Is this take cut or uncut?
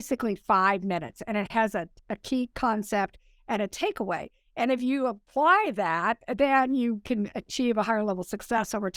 cut